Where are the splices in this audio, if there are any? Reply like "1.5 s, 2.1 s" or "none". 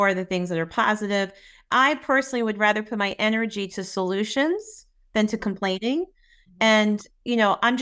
1.7 s